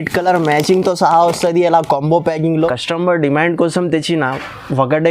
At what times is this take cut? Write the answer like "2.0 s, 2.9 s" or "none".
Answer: 2.5 s